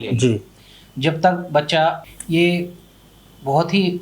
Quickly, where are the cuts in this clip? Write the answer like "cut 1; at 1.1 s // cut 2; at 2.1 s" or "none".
cut 1; at 2.0 s